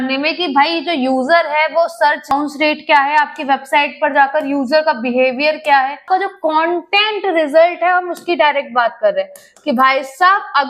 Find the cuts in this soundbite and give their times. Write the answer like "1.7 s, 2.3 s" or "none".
2.3 s, 6.0 s